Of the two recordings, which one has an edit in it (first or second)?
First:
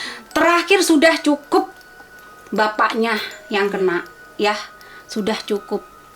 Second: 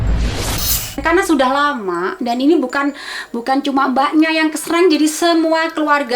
second